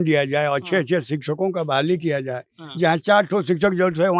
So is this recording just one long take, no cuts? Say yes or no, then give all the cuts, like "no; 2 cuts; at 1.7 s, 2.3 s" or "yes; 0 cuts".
yes; 0 cuts